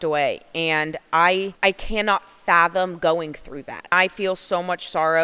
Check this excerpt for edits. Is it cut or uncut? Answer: cut